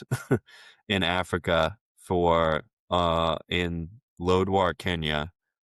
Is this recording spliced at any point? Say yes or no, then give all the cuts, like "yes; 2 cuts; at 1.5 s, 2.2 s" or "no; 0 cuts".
no; 0 cuts